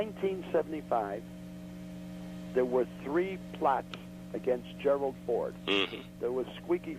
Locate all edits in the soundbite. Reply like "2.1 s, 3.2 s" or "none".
3.3 s